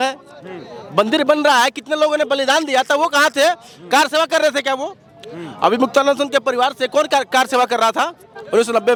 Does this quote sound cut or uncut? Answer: uncut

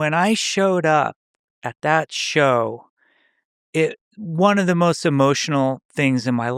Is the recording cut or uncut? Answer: uncut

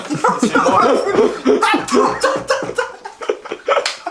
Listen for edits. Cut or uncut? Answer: uncut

